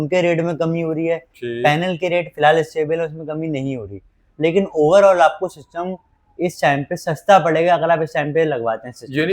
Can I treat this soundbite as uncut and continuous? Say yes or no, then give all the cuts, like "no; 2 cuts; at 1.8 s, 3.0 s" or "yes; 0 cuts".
yes; 0 cuts